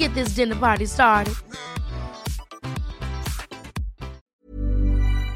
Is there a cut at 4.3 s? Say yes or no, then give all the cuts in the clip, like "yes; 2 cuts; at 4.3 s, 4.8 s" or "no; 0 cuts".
yes; 1 cut; at 4.3 s